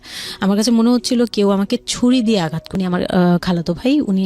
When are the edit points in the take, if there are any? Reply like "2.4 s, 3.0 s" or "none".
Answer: 2.6 s